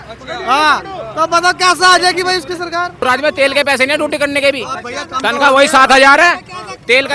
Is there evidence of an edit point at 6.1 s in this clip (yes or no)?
no